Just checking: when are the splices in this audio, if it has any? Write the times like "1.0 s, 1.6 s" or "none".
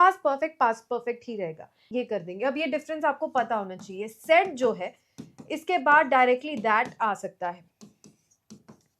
1.8 s